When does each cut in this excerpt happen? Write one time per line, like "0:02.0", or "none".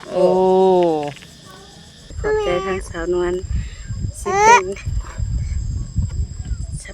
0:02.0